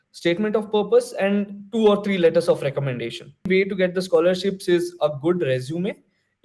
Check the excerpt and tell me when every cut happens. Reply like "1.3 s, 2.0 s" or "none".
3.5 s